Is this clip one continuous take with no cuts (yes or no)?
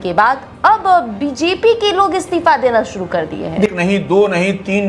no